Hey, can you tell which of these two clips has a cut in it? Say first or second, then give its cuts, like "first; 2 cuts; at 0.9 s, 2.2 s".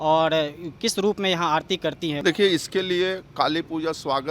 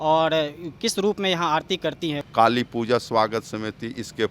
second; 1 cut; at 2.1 s